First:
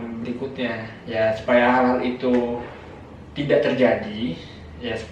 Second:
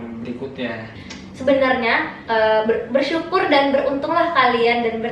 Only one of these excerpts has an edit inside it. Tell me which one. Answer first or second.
second